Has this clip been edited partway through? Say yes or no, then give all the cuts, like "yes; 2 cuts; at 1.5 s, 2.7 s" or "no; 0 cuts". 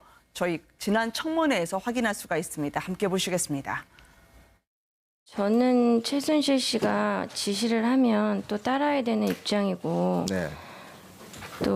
yes; 1 cut; at 6.9 s